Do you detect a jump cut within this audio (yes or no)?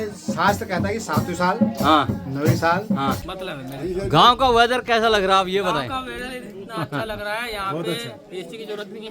yes